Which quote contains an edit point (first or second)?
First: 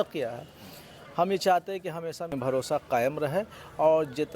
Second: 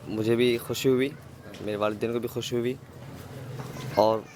first